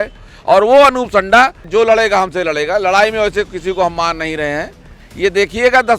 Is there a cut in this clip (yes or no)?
yes